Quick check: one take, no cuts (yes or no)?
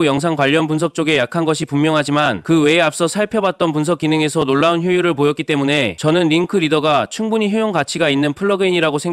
no